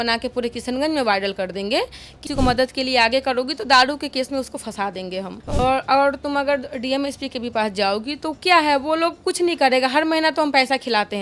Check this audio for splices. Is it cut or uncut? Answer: cut